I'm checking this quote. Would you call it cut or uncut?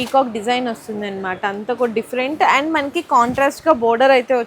uncut